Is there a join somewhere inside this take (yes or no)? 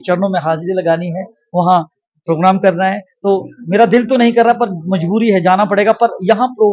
no